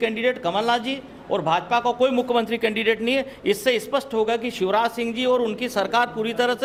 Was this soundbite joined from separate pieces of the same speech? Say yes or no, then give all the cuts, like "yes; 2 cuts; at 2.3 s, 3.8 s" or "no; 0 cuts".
no; 0 cuts